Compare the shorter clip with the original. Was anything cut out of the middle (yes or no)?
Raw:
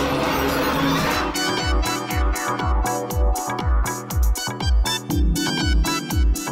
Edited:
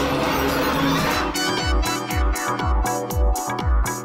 no